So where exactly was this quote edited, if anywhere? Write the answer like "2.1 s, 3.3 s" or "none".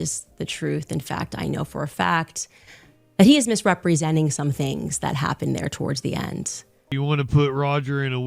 6.9 s